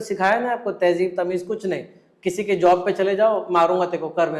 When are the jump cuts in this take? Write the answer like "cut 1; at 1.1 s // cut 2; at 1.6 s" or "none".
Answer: none

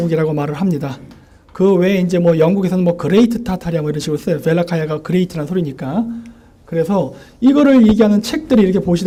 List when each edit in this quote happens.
none

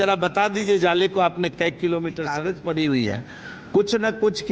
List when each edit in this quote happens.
cut 1; at 2.3 s

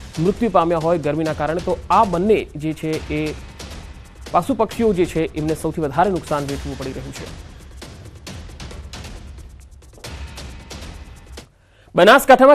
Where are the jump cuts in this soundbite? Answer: cut 1; at 2.1 s

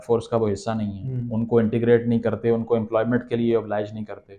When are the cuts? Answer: none

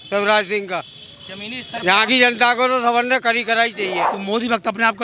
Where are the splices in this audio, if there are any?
cut 1; at 4.1 s

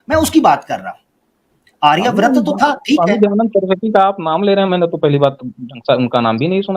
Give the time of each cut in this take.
none

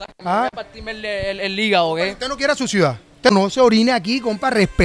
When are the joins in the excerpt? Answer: cut 1; at 3.3 s

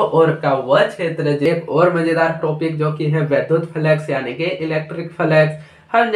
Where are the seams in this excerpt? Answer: cut 1; at 1.4 s

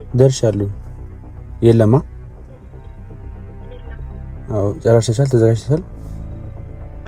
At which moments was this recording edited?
cut 1; at 2.1 s // cut 2; at 4.5 s

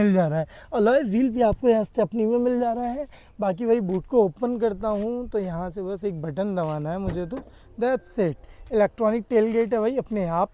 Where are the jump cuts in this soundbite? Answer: none

